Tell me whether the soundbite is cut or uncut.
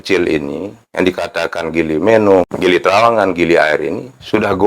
cut